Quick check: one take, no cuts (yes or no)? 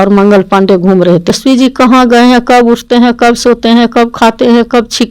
no